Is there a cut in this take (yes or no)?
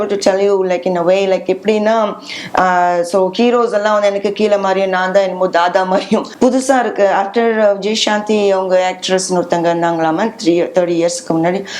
yes